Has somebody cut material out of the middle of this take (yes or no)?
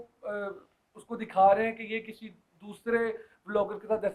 no